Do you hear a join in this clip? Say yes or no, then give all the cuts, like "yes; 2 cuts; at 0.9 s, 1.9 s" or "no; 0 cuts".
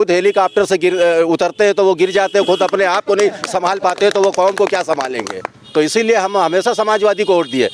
yes; 1 cut; at 5.6 s